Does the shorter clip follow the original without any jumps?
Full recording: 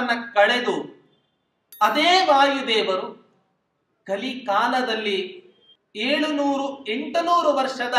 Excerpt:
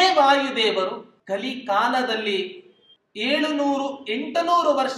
no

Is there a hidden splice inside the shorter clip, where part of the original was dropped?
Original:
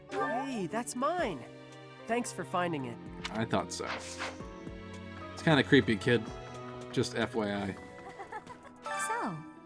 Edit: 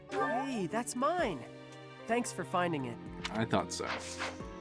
no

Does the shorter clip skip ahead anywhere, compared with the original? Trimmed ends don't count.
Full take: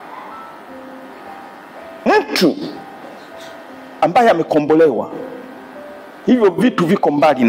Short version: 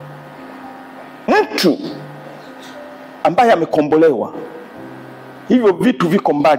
no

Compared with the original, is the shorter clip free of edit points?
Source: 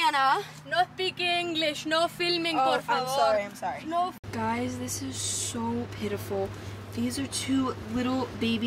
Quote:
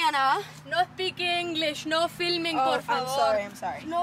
yes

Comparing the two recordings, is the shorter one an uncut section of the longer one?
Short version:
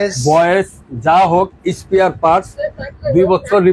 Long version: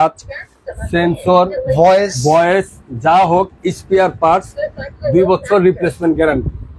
yes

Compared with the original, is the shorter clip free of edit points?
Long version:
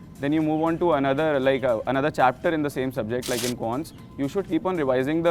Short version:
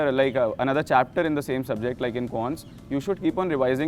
yes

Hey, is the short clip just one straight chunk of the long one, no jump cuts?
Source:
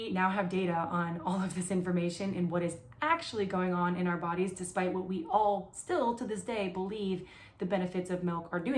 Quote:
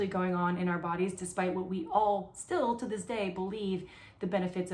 yes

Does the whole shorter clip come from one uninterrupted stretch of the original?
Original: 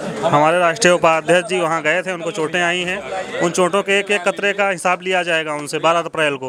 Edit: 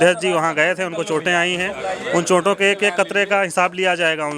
yes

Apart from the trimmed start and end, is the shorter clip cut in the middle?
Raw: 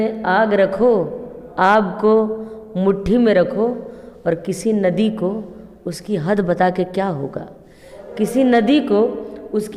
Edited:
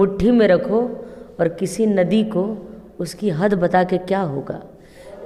no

